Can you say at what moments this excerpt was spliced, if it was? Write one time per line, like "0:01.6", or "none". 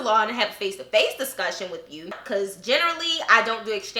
0:02.2